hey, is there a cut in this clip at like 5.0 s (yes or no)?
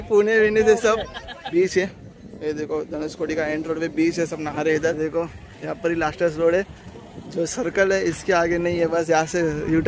yes